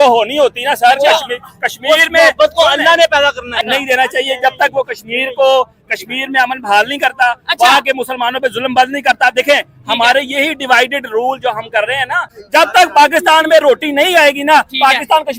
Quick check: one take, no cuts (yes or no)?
no